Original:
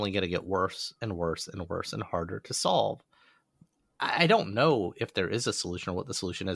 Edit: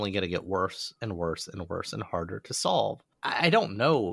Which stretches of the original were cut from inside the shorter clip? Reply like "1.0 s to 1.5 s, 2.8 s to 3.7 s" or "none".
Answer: 3.1 s to 3.9 s